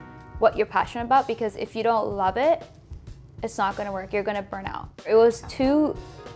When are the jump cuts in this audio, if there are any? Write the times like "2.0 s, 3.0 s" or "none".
5.1 s